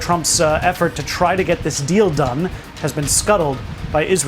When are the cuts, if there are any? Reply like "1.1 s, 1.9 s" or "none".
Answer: 2.6 s

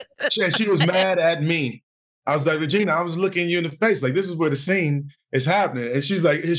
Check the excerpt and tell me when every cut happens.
none

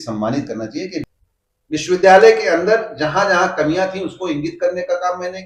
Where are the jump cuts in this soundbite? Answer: 1.0 s

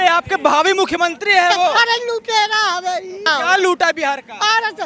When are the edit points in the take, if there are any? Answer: 1.7 s, 3.3 s

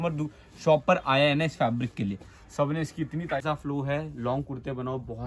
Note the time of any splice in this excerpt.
3.4 s

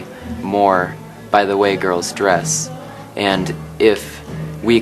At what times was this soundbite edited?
none

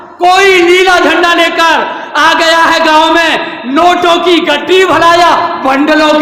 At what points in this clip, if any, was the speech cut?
none

